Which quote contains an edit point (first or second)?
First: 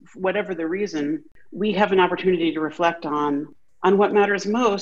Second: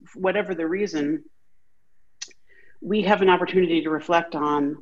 first